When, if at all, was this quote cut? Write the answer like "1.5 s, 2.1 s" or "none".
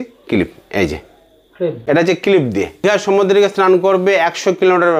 1.8 s, 2.8 s